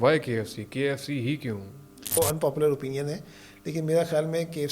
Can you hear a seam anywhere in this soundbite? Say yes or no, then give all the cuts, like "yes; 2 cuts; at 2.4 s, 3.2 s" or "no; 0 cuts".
yes; 1 cut; at 2.2 s